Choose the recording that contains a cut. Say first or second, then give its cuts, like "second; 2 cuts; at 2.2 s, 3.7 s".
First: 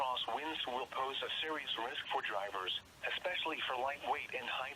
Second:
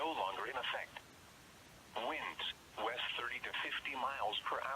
second; 1 cut; at 3.6 s